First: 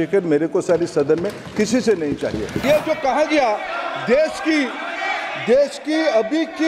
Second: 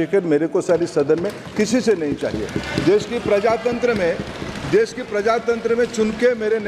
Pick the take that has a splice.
first; 1 cut; at 2.6 s

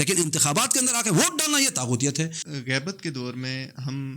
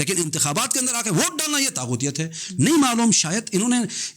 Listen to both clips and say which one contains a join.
first; 1 cut; at 2.4 s

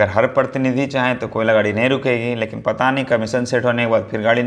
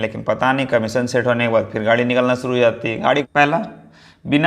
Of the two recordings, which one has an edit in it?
second; 1 cut; at 3.3 s

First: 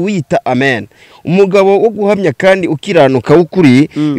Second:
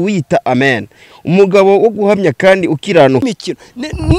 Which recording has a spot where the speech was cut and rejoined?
second; 1 cut; at 3.2 s

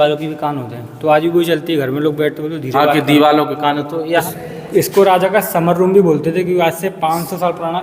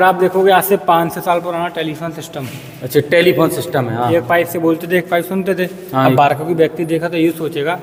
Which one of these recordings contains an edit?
first; 1 cut; at 4.2 s

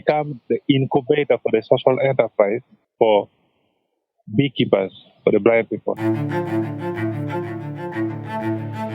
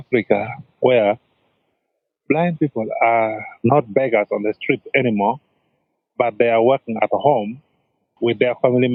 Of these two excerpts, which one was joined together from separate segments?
first; 1 cut; at 6.0 s

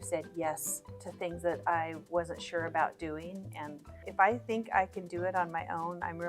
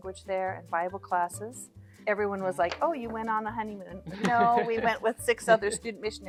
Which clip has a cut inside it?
first; 1 cut; at 4.0 s

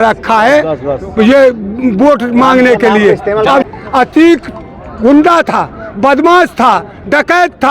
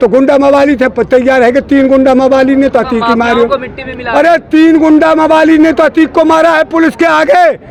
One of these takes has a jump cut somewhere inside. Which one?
first; 1 cut; at 3.7 s

